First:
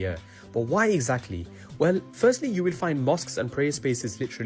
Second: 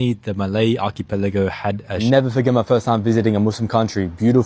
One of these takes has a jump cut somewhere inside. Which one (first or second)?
second